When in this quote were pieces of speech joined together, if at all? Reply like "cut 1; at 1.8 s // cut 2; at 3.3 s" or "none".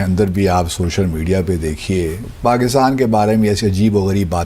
cut 1; at 2.3 s